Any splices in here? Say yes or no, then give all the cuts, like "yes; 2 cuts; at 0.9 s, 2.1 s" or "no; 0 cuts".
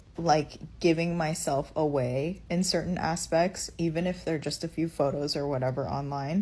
yes; 1 cut; at 2.3 s